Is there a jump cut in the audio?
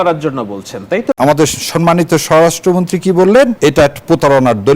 yes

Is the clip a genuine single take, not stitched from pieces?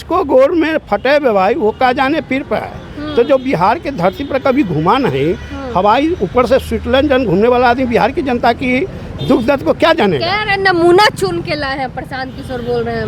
yes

